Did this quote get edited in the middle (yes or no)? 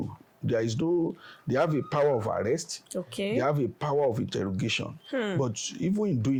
no